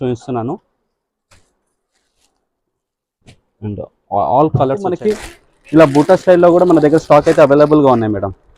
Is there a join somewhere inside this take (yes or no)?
yes